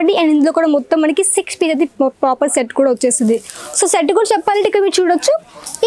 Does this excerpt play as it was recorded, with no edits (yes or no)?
yes